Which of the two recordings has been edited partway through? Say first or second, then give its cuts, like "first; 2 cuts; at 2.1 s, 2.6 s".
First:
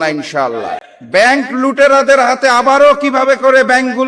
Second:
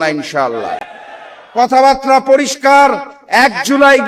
first; 1 cut; at 0.9 s